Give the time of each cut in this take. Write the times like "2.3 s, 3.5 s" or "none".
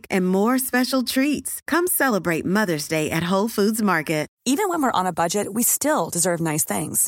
4.3 s